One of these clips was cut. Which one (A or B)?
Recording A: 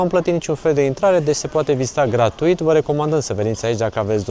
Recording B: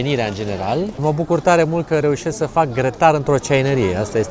B